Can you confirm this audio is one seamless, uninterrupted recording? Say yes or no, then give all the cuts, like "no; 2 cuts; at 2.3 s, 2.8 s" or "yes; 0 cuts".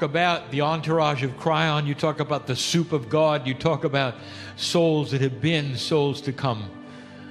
no; 1 cut; at 4.0 s